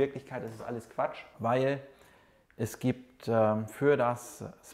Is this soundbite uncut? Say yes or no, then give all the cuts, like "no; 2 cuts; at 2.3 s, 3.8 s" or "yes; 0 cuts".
yes; 0 cuts